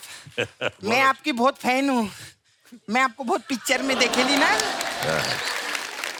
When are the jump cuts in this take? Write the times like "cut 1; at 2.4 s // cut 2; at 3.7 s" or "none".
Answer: none